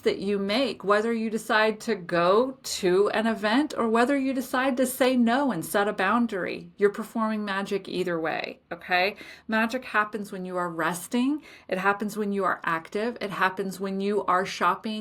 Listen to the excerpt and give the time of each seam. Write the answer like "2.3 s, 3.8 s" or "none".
none